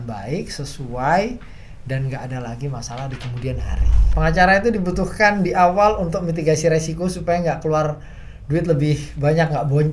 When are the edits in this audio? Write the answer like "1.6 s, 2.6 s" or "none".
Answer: 4.1 s